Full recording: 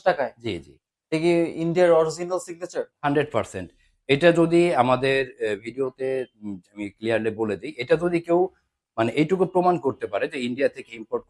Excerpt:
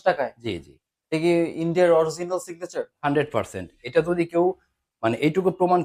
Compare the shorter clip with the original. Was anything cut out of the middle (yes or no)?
yes